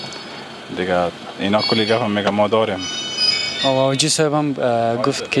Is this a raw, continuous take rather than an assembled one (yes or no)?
yes